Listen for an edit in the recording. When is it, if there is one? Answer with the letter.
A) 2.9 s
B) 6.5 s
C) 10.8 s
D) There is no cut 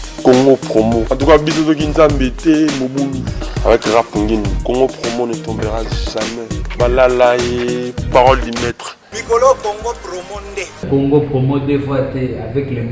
C